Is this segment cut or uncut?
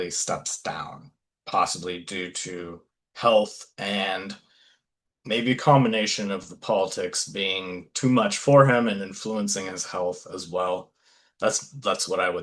uncut